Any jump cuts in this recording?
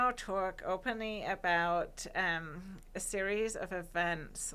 no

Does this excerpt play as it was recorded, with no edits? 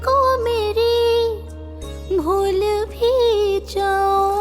yes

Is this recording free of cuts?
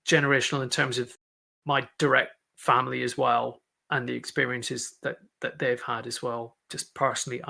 yes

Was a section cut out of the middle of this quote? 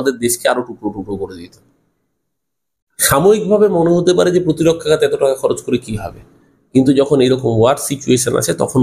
no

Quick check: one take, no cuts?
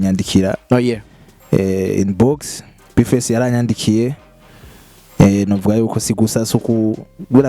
yes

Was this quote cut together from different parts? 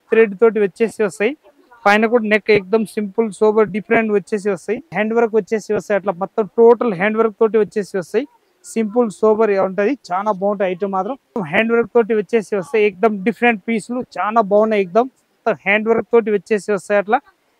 yes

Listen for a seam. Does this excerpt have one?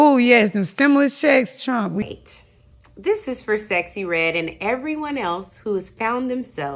yes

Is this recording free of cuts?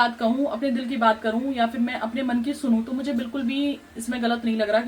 yes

